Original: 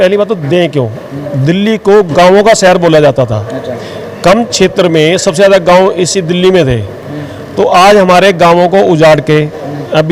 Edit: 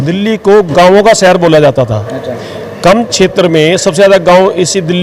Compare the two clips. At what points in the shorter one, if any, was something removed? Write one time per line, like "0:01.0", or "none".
none